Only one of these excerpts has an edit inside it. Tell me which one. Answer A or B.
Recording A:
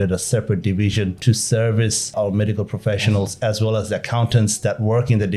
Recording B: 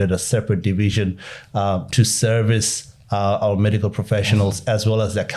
A